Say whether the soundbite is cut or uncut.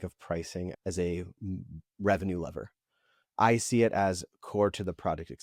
uncut